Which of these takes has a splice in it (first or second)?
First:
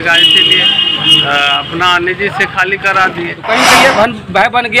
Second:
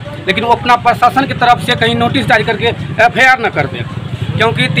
first